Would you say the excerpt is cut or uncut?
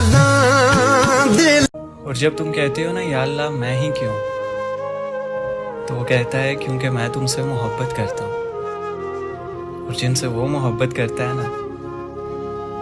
uncut